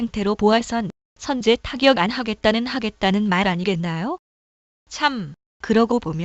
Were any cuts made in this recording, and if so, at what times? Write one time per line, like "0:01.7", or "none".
0:01.8